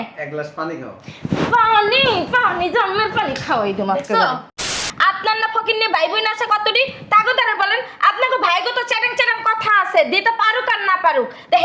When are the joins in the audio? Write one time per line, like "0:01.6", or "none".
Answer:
0:04.8